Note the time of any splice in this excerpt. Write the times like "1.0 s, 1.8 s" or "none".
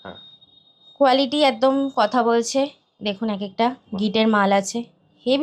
none